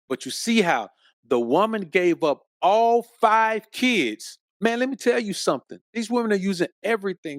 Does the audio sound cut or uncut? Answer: cut